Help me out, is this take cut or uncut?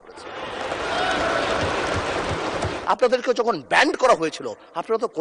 cut